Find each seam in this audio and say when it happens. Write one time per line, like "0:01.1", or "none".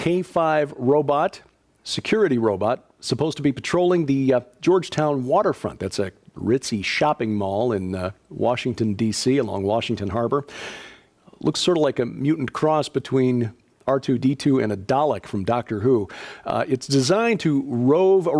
none